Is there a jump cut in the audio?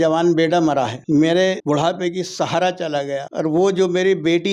yes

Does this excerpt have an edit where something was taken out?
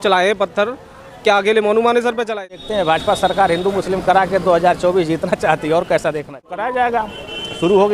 yes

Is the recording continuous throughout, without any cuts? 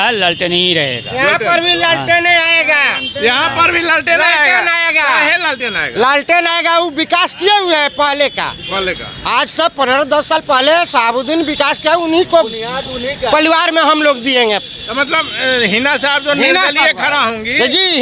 yes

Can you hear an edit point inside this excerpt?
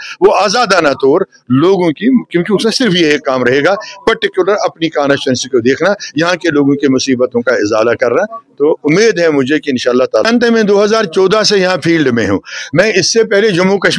yes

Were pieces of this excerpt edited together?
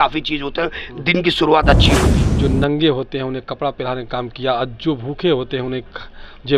yes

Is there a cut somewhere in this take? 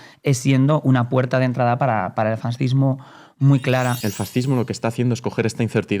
yes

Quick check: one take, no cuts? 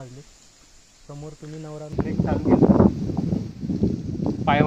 no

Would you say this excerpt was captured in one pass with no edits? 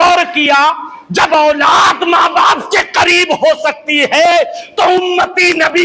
yes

